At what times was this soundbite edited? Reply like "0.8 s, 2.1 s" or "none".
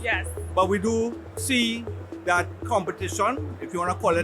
1.3 s